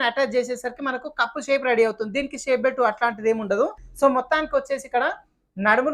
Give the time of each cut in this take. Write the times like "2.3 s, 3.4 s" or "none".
3.8 s

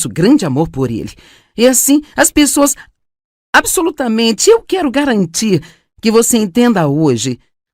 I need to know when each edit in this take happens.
6.3 s

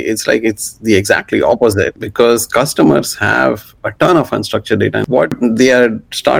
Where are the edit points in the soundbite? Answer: 2.0 s, 5.0 s

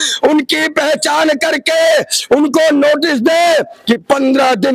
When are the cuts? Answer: none

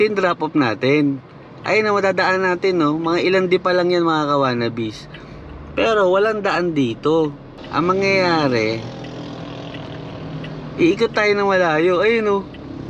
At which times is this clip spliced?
none

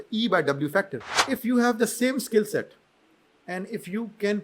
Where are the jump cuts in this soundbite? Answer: 1.2 s

